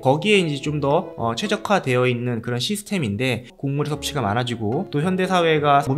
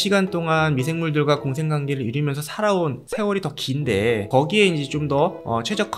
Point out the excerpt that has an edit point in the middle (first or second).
first